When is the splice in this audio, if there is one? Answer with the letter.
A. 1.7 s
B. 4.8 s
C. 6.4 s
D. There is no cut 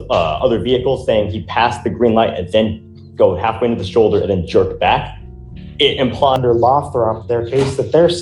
C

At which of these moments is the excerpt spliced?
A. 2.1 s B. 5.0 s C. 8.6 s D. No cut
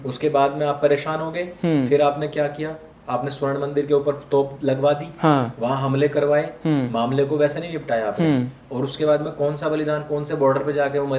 D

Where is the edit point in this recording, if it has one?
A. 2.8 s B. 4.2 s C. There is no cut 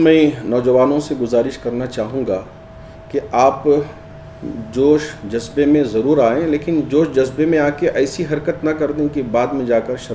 C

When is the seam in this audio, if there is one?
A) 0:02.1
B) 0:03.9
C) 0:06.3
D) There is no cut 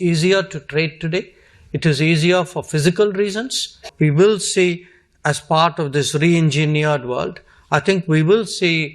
B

